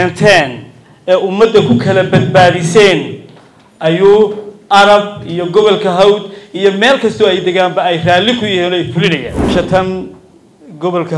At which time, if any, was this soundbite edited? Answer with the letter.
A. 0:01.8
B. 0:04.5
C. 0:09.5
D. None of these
C